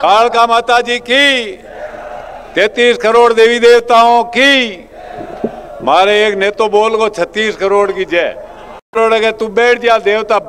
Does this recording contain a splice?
no; 0 cuts

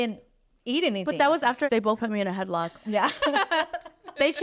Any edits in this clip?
yes; 1 cut; at 1.7 s

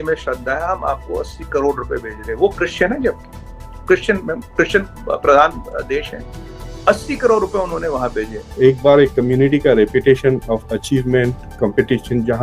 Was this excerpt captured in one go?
no; 1 cut; at 8.4 s

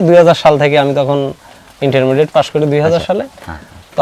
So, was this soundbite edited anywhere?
no; 0 cuts

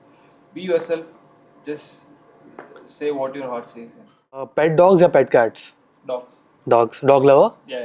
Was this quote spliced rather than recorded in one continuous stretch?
yes; 1 cut; at 4.5 s

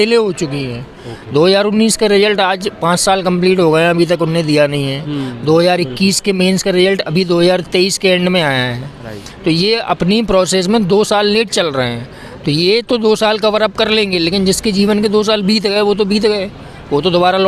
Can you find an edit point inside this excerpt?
no; 0 cuts

